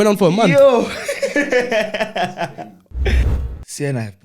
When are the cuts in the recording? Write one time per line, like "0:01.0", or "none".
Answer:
0:03.2